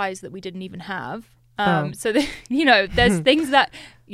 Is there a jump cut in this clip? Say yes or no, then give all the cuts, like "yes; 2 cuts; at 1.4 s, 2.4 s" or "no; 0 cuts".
no; 0 cuts